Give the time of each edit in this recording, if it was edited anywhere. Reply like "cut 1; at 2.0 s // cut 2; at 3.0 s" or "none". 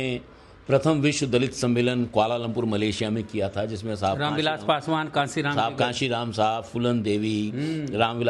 none